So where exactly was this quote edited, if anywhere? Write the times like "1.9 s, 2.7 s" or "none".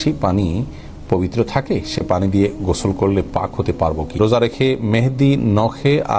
4.2 s